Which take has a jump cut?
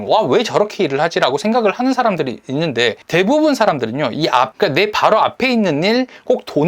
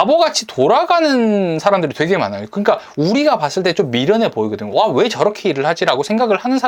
first; 2 cuts; at 3.0 s, 4.5 s

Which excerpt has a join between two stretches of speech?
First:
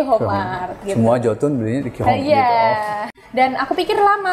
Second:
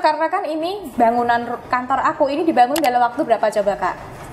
first; 1 cut; at 3.1 s

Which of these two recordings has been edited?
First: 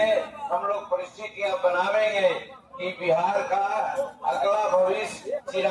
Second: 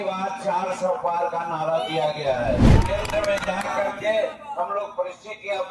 second; 1 cut; at 2.7 s

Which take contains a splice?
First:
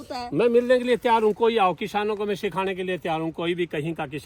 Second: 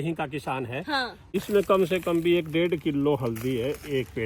second; 1 cut; at 1.4 s

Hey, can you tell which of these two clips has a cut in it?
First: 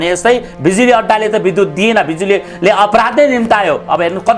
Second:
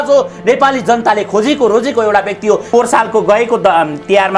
second; 1 cut; at 2.6 s

